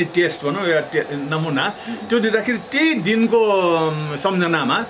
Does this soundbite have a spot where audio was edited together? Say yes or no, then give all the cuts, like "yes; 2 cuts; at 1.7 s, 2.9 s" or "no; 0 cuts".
no; 0 cuts